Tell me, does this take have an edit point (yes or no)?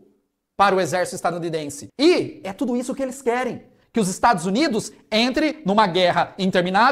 yes